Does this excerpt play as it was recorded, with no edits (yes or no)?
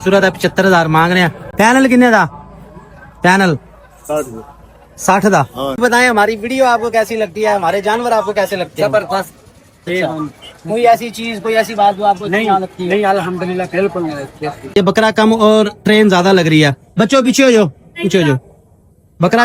no